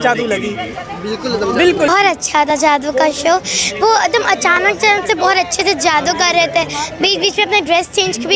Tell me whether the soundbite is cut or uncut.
cut